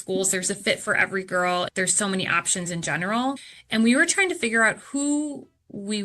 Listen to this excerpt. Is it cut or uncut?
cut